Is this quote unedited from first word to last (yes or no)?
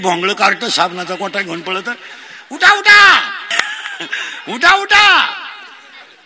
no